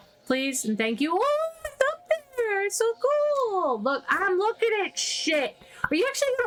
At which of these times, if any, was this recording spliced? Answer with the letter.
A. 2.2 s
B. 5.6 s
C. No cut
C